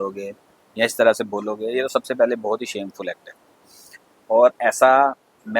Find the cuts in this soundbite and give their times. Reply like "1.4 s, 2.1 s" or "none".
none